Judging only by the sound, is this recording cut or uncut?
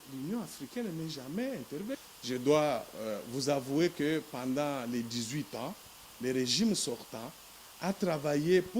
cut